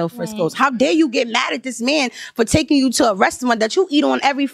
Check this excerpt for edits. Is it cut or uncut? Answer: uncut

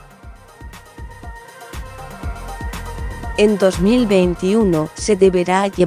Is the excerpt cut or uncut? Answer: cut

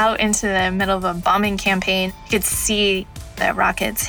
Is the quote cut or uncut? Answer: cut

